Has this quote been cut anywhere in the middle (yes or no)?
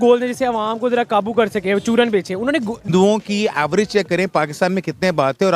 yes